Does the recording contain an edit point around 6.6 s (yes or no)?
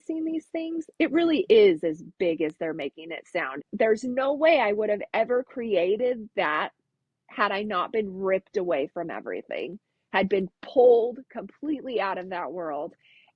no